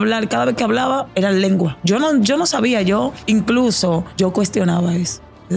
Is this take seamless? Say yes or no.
no